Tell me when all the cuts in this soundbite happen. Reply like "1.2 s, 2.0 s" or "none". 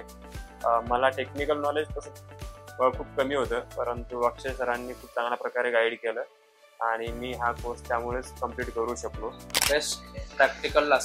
9.5 s